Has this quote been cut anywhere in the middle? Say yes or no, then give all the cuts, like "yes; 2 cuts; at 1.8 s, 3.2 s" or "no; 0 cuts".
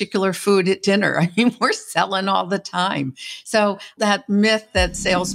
yes; 1 cut; at 3.9 s